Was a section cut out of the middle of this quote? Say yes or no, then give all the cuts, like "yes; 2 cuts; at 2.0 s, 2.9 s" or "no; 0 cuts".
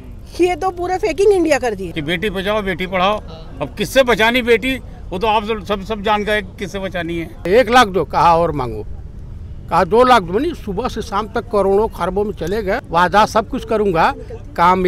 yes; 3 cuts; at 1.9 s, 7.4 s, 12.8 s